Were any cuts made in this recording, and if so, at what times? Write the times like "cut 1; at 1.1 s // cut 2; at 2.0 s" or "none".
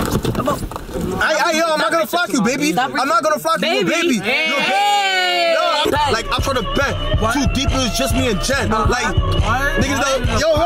cut 1; at 5.8 s